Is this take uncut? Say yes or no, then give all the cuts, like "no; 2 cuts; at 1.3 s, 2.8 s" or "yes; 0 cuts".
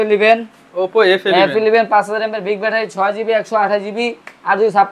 yes; 0 cuts